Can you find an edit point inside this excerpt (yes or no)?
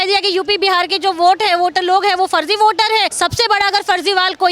yes